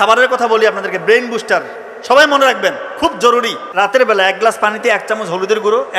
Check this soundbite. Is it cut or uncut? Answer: cut